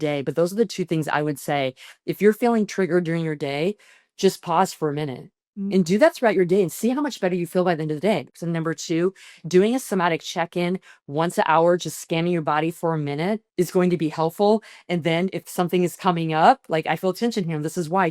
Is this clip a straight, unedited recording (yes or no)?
no